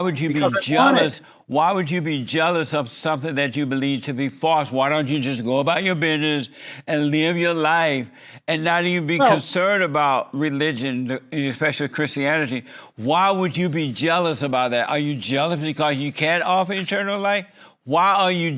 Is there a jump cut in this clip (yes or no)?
no